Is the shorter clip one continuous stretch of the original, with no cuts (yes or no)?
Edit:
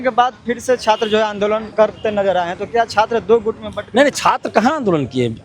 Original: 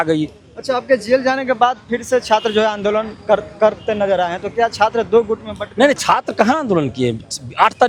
no